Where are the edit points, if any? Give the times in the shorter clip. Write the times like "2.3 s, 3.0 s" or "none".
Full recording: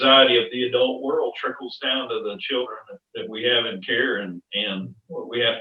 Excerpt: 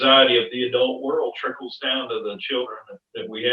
none